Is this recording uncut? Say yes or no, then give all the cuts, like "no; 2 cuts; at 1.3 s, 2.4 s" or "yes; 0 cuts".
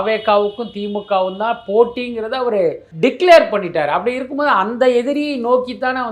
no; 1 cut; at 2.9 s